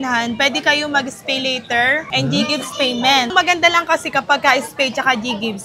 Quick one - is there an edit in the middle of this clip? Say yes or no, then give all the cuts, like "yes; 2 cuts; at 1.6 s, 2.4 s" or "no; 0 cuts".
yes; 2 cuts; at 2.1 s, 3.3 s